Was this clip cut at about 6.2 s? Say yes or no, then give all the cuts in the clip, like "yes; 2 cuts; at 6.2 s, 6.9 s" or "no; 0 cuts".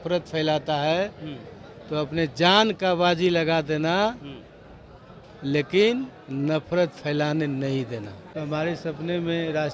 no; 1 cut; at 8.3 s